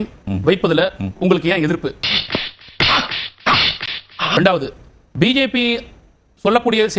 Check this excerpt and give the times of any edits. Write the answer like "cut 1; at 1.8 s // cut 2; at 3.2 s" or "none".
cut 1; at 2.1 s // cut 2; at 4.3 s